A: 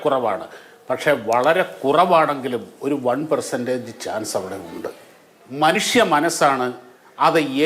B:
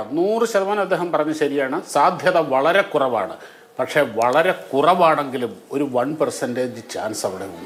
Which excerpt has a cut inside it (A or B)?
A